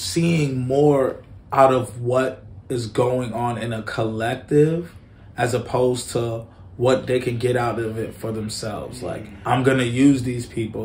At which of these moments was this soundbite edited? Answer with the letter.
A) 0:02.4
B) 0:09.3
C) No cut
B